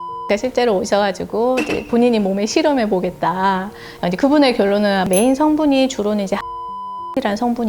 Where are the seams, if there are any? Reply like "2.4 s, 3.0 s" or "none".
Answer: 3.8 s, 5.0 s